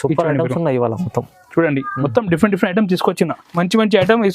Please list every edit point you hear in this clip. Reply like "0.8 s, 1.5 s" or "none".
3.4 s

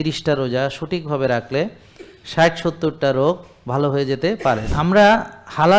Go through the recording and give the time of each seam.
4.7 s

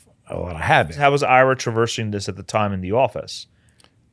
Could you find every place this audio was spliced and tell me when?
1.0 s

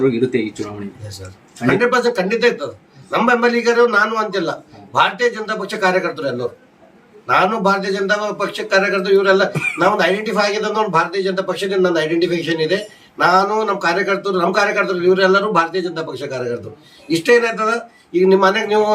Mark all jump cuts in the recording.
none

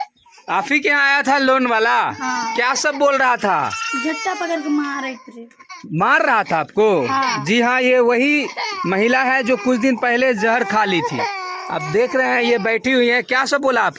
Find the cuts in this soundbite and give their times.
none

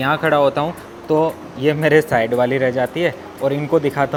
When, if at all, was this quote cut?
none

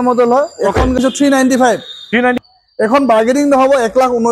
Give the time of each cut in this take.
1.0 s, 2.4 s

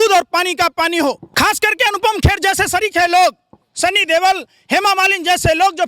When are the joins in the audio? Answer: 1.3 s

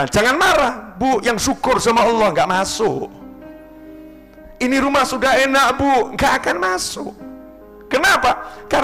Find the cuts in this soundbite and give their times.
none

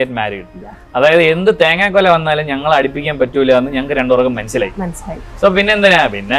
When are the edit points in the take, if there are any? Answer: none

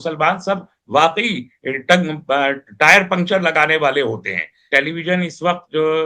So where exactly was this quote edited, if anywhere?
4.7 s

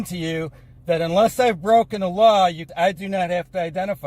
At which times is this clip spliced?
2.7 s

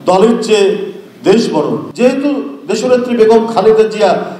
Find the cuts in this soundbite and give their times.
1.9 s

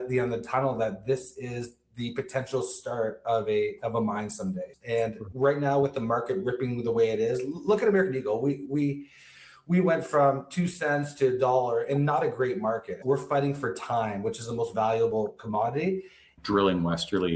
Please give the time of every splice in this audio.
4.7 s, 13.0 s, 16.4 s

